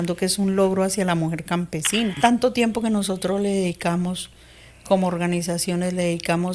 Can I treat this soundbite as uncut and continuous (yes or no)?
no